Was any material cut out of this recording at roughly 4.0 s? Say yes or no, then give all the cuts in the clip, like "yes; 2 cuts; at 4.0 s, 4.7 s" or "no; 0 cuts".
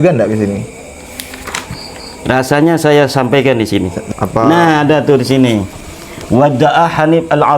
yes; 1 cut; at 4.0 s